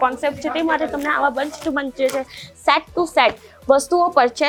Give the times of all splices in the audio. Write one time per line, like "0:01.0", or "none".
none